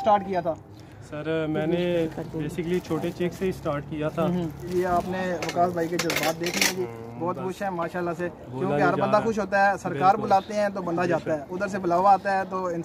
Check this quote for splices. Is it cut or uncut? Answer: cut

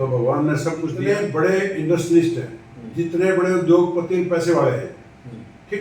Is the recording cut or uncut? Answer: cut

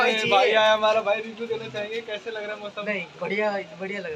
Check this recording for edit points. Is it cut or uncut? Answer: uncut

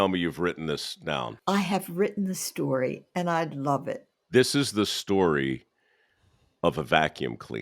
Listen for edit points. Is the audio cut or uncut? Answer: cut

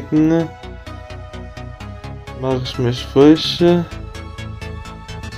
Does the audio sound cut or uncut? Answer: cut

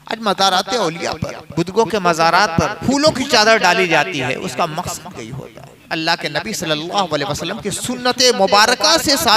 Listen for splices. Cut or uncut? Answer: cut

